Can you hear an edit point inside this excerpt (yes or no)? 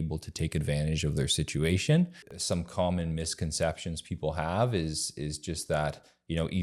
yes